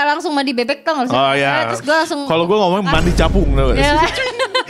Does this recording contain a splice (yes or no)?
no